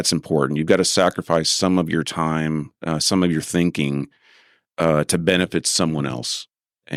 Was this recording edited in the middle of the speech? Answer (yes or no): no